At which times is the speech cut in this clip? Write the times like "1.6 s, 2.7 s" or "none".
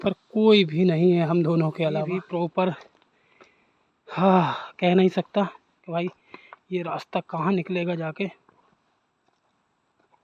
2.2 s